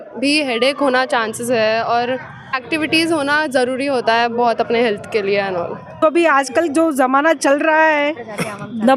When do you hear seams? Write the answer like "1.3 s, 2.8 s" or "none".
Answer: 2.5 s, 6.0 s